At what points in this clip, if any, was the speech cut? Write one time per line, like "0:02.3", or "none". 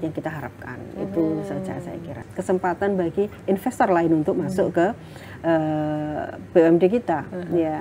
0:02.3